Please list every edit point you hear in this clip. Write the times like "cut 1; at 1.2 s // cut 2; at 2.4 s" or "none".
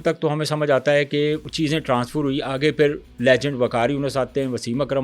cut 1; at 1.5 s